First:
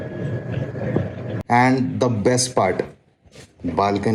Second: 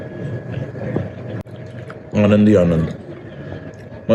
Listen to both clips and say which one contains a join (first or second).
first